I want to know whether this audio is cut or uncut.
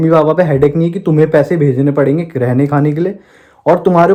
uncut